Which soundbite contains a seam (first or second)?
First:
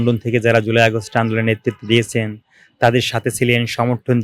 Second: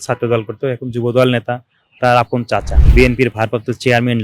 second